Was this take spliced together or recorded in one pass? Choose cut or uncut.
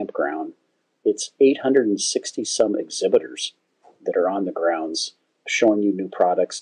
uncut